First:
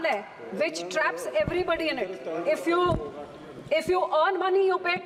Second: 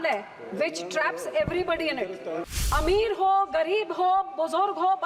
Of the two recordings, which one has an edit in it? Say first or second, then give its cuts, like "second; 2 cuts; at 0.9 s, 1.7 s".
second; 1 cut; at 2.4 s